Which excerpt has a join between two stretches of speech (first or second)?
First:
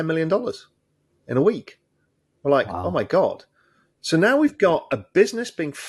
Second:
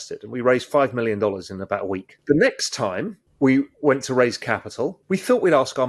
second